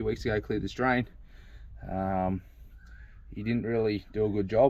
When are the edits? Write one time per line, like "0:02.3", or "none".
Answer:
none